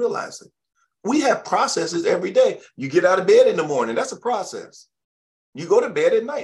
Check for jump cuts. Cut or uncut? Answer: uncut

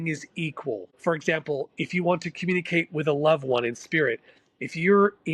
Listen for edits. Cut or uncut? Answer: cut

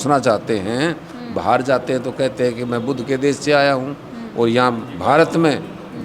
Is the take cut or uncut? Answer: uncut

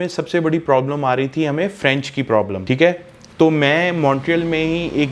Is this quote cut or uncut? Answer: uncut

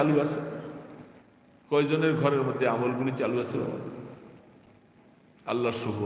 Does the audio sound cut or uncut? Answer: uncut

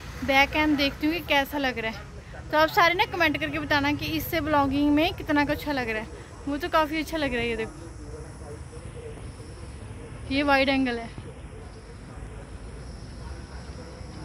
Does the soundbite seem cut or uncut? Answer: uncut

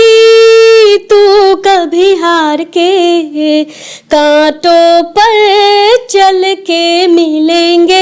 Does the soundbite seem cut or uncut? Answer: uncut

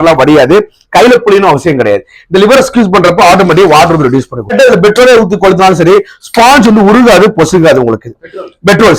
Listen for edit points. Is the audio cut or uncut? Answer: cut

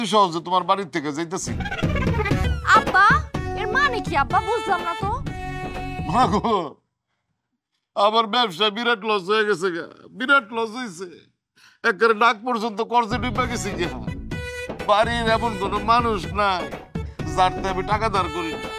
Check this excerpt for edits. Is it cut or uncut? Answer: cut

